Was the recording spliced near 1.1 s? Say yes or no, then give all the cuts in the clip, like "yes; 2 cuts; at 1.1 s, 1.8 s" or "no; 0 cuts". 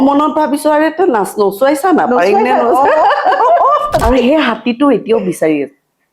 no; 1 cut; at 4.0 s